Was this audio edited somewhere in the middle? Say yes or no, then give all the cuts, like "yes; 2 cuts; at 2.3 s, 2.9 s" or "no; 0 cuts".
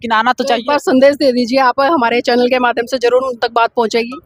no; 0 cuts